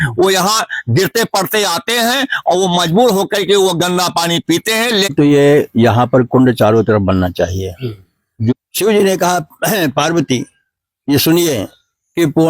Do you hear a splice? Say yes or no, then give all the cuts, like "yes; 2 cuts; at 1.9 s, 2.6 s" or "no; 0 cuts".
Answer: yes; 2 cuts; at 5.1 s, 8.5 s